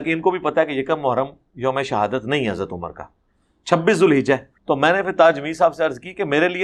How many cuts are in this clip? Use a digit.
1